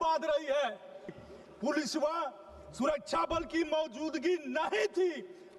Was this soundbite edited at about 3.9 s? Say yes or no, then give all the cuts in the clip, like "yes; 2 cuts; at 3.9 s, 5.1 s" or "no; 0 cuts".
no; 1 cut; at 1.2 s